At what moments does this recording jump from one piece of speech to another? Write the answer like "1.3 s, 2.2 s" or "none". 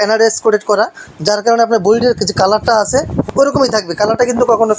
3.2 s